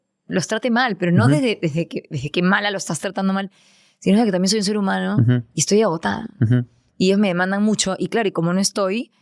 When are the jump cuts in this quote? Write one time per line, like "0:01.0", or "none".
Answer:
none